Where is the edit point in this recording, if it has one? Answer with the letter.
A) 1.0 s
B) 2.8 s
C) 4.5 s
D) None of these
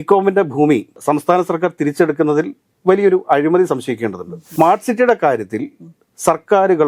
C